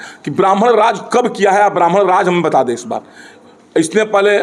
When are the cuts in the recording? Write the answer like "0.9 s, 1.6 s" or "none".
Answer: none